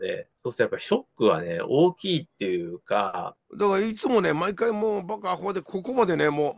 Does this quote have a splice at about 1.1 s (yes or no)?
no